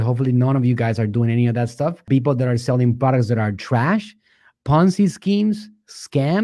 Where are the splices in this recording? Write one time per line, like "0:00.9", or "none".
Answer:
0:02.0